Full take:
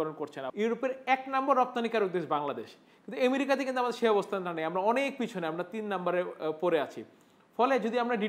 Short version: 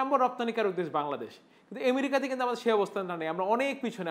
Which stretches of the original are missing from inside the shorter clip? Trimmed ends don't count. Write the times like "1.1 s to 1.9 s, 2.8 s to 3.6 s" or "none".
none